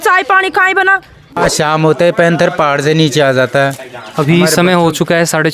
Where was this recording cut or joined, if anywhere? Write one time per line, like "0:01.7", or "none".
none

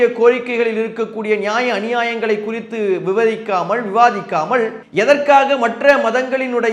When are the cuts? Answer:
0:04.8

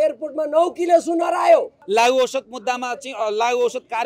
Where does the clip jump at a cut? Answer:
0:01.8

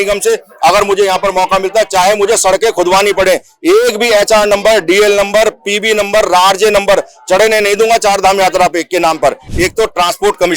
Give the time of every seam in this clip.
0:09.5

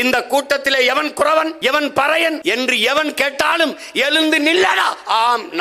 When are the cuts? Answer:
0:01.5
0:02.4

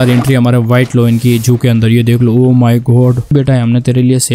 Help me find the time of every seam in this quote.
0:03.3

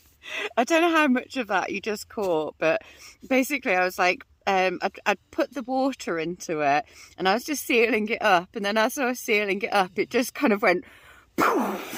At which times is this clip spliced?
none

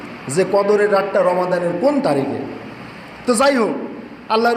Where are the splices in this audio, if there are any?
none

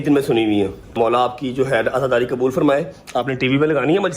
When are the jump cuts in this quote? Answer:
0:00.9

